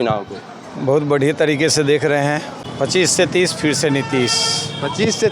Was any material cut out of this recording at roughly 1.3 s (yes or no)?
no